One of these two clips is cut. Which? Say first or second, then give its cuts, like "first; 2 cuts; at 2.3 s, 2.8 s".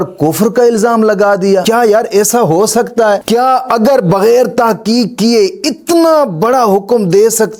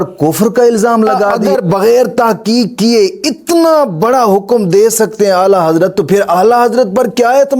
second; 1 cut; at 1.3 s